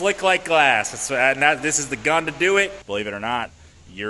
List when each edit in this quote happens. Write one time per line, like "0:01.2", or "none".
0:02.8